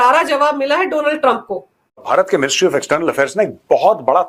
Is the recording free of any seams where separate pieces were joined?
no; 1 cut; at 2.0 s

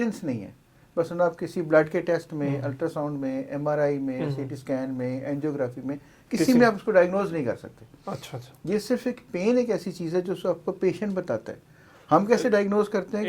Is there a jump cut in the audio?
no; 0 cuts

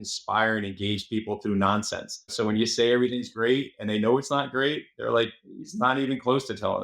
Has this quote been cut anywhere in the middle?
yes; 1 cut; at 2.3 s

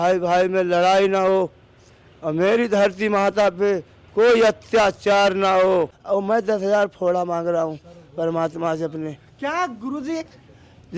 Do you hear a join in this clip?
yes; 1 cut; at 6.0 s

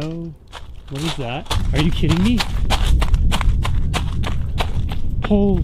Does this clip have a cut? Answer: yes; 1 cut; at 1.5 s

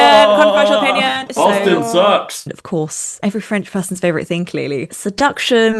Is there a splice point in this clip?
yes; 2 cuts; at 1.3 s, 2.5 s

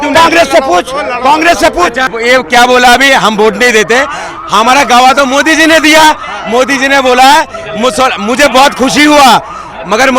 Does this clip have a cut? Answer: yes; 1 cut; at 2.1 s

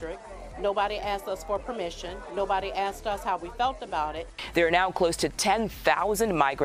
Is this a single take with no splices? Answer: yes; 0 cuts

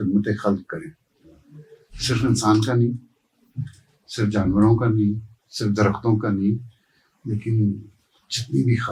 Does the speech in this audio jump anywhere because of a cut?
no; 0 cuts

